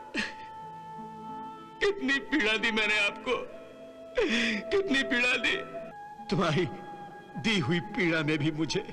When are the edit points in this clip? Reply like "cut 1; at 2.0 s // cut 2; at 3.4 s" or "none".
cut 1; at 6.0 s